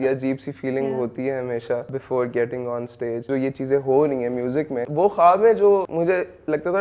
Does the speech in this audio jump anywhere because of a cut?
yes; 4 cuts; at 2.0 s, 3.3 s, 4.8 s, 5.9 s

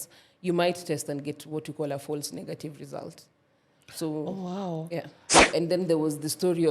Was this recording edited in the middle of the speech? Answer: yes; 1 cut; at 5.3 s

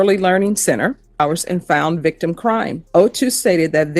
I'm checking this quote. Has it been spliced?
yes; 2 cuts; at 1.2 s, 2.8 s

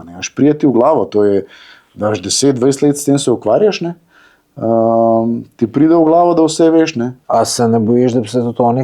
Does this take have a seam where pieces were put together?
yes; 1 cut; at 7.1 s

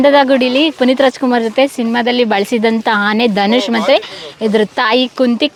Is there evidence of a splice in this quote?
no; 0 cuts

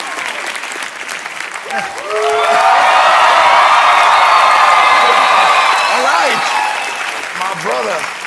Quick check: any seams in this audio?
no; 0 cuts

